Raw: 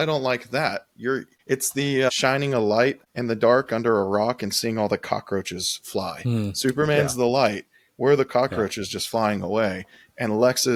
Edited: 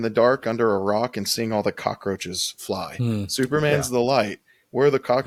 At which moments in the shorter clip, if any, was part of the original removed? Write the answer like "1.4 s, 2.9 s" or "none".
none